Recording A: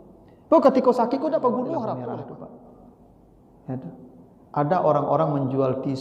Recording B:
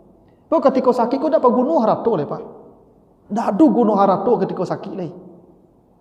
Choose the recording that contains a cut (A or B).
A